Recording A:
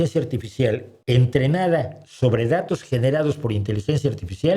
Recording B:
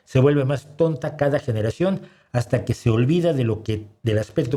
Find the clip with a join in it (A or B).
A